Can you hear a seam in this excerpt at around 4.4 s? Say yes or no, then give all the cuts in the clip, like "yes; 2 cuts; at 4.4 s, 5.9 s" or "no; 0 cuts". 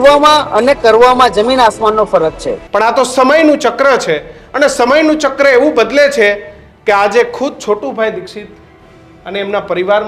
no; 1 cut; at 2.5 s